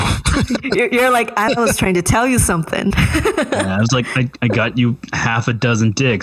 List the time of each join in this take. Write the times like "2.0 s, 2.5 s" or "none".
1.5 s